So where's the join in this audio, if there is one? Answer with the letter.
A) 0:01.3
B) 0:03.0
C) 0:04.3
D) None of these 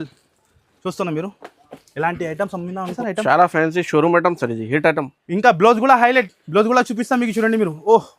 B